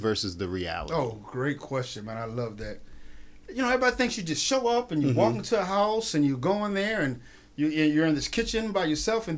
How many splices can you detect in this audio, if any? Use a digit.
0